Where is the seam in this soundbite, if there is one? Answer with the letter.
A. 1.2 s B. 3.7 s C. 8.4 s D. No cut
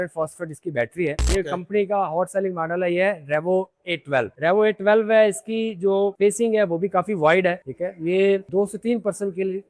A